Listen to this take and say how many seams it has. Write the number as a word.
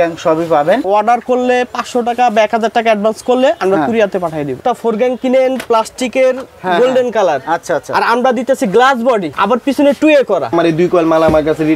three